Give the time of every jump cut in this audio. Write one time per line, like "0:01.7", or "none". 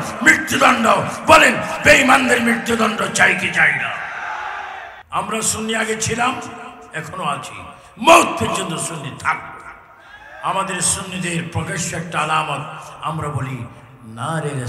0:04.9